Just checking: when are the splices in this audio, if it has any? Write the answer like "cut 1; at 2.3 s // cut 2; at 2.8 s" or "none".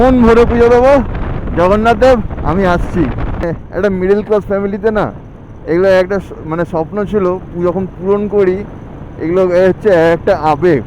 cut 1; at 3.4 s